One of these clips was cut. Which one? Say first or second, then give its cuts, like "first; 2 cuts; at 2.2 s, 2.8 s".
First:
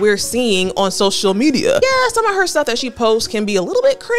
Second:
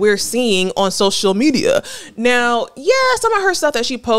first; 1 cut; at 1.8 s